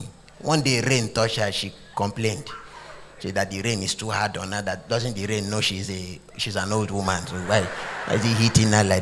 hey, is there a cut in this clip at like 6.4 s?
no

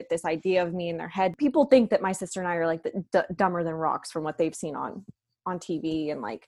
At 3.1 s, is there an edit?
no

